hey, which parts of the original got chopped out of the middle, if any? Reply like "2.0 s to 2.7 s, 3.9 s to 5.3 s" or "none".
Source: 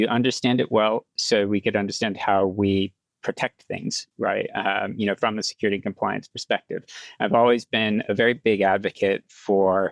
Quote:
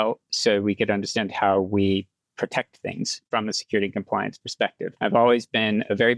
4.1 s to 5.2 s, 6.8 s to 7.0 s